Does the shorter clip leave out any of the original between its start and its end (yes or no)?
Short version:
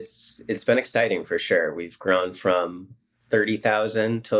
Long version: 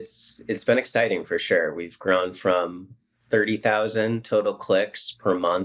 no